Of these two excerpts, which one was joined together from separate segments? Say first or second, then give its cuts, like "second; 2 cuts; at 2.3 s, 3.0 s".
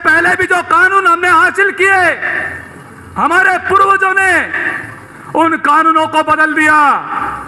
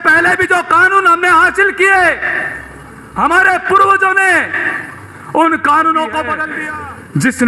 second; 1 cut; at 6.4 s